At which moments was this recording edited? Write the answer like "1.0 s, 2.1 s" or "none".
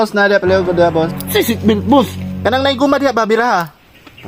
none